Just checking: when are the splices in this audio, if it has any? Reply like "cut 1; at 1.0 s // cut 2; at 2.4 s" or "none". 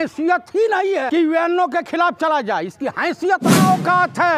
cut 1; at 1.1 s // cut 2; at 3.6 s